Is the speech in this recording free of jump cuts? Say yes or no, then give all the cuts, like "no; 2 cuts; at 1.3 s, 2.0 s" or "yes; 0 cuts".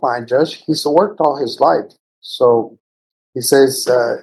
yes; 0 cuts